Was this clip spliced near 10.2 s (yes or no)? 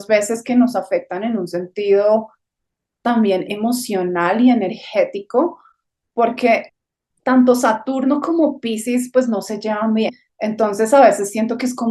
yes